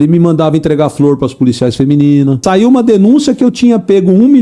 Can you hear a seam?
yes; 1 cut; at 2.4 s

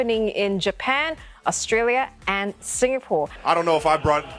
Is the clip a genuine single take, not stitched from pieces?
no; 1 cut; at 3.4 s

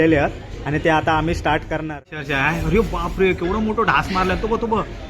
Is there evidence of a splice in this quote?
yes; 1 cut; at 1.8 s

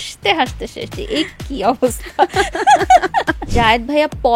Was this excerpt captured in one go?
no; 1 cut; at 3.4 s

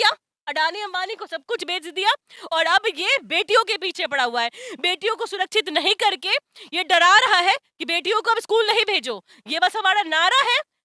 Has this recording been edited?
no; 0 cuts

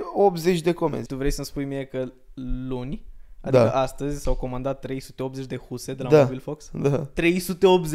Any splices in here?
yes; 1 cut; at 1.1 s

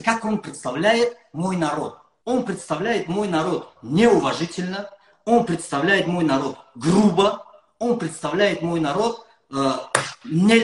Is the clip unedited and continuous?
no; 1 cut; at 2.1 s

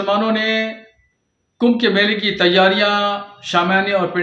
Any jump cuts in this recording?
no; 0 cuts

